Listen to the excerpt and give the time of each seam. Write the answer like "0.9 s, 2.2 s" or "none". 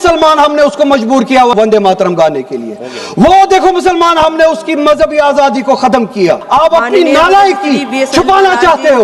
1.5 s, 6.4 s